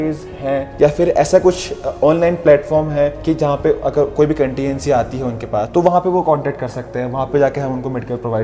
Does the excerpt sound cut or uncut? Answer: uncut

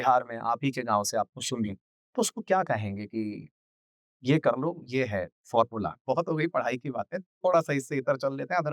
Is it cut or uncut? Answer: cut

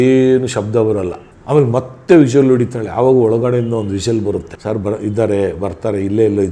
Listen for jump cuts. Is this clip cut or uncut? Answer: uncut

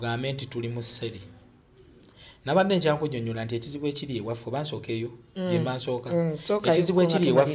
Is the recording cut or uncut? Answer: uncut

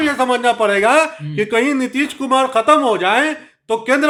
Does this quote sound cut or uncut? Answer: uncut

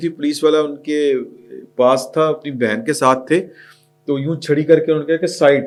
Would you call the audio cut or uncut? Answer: uncut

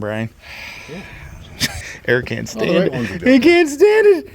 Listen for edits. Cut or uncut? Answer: cut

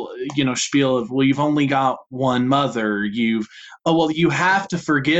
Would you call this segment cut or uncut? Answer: uncut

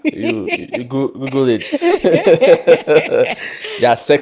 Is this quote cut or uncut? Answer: uncut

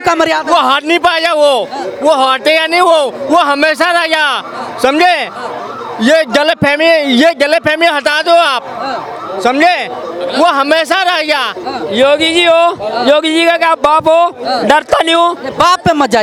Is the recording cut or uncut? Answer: uncut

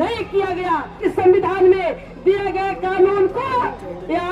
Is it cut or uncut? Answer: cut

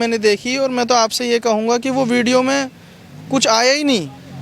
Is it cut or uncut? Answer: uncut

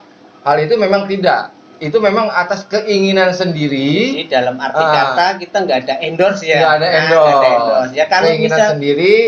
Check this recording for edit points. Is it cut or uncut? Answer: uncut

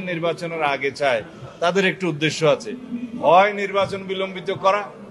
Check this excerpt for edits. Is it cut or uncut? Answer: uncut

